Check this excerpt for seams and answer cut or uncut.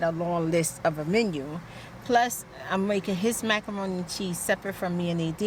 uncut